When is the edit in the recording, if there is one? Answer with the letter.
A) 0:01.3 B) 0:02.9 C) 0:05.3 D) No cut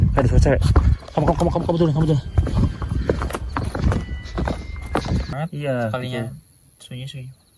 C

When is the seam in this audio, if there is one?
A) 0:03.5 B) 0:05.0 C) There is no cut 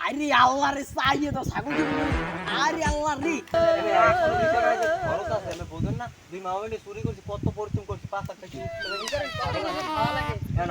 A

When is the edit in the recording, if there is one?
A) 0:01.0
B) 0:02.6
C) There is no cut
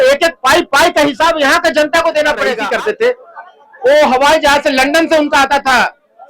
B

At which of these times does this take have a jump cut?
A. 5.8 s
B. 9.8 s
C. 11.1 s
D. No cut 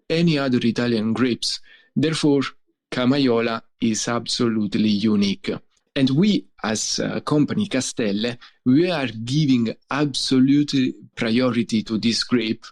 A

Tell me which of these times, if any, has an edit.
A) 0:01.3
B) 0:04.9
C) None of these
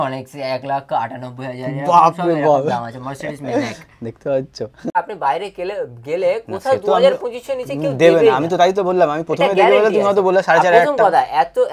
B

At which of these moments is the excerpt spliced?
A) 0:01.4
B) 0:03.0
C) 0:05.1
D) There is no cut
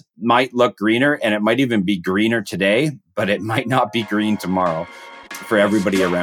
C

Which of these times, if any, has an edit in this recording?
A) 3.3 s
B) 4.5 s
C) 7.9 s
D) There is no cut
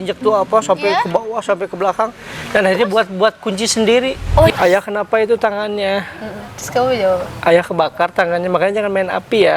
B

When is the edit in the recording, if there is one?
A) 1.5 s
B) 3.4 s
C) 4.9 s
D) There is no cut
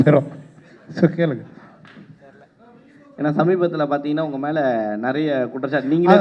D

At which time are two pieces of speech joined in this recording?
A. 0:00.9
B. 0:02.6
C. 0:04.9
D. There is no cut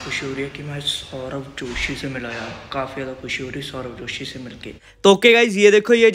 C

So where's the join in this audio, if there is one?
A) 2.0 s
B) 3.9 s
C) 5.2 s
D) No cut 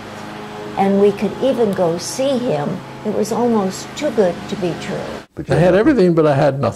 C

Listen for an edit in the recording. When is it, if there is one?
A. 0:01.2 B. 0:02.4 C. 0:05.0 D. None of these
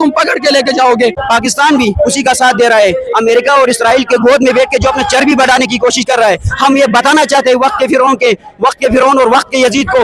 A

